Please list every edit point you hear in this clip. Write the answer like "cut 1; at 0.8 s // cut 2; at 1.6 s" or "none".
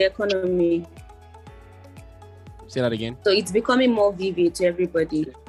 none

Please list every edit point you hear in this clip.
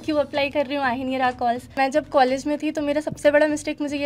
cut 1; at 1.7 s

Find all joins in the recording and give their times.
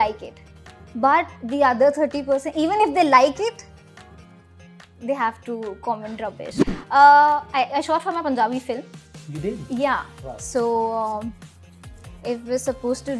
cut 1; at 6.5 s

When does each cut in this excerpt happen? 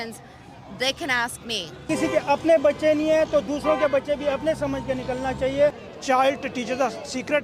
cut 1; at 1.8 s // cut 2; at 5.9 s

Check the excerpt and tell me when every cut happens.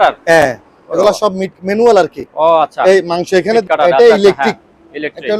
cut 1; at 3.7 s

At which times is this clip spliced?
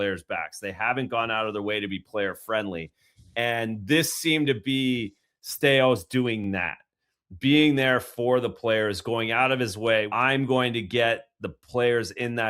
cut 1; at 10.1 s

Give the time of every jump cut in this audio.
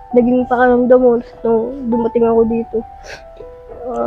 none

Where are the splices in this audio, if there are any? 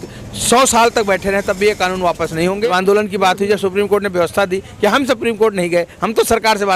cut 1; at 2.6 s

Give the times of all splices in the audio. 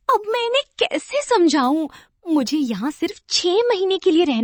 none

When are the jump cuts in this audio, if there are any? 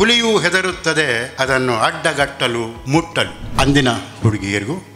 cut 1; at 1.3 s // cut 2; at 3.2 s

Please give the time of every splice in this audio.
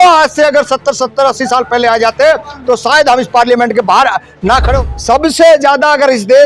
cut 1; at 4.8 s

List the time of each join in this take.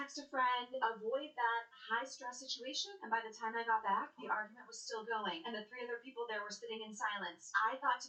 none

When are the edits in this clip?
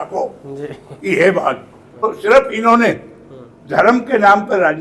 cut 1; at 2.0 s

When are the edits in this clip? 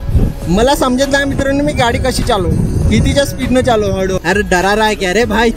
cut 1; at 4.2 s

